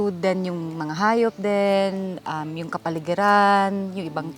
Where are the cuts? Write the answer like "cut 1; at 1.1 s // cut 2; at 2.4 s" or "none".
none